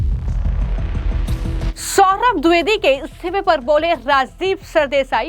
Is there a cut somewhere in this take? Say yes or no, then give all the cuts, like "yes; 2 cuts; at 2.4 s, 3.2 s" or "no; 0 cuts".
yes; 1 cut; at 1.7 s